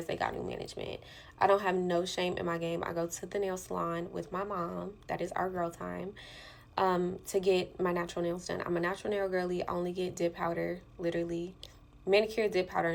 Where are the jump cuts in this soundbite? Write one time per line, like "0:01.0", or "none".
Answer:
none